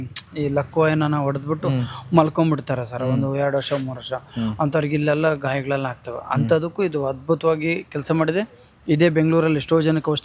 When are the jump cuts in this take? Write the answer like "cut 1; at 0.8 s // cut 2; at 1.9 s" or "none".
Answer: none